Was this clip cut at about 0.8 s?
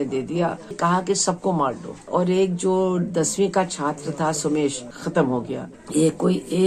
yes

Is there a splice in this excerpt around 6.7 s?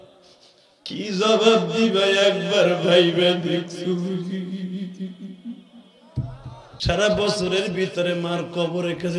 yes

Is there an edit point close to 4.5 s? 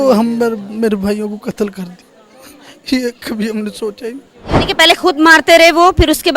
yes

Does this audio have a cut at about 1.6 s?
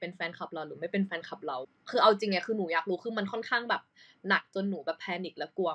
yes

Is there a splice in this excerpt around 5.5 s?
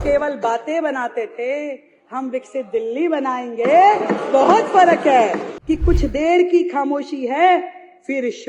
yes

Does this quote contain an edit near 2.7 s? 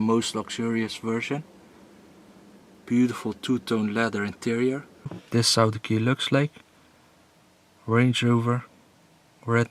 no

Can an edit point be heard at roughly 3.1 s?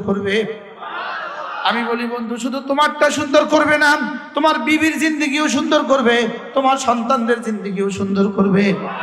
no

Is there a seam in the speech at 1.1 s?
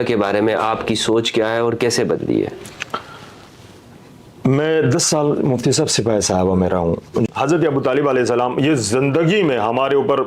no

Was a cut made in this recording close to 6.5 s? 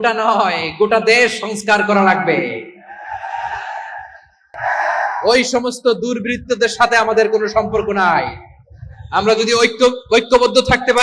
no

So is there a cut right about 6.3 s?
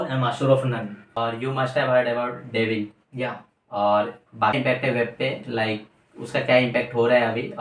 no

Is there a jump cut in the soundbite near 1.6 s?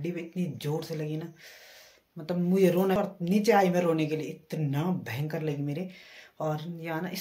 no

